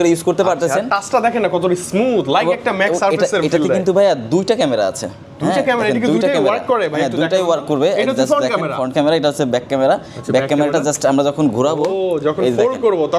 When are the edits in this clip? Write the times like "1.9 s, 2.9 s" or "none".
none

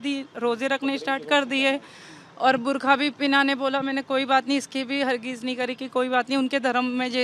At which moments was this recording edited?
none

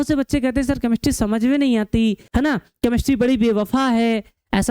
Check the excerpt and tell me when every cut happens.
2.2 s

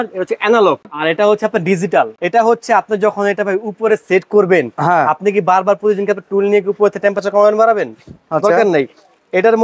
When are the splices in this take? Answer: 0.9 s, 2.2 s

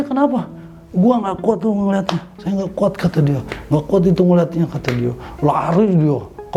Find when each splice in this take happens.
none

